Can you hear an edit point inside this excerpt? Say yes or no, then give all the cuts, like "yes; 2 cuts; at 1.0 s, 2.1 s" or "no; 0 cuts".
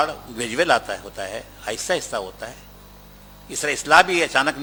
no; 0 cuts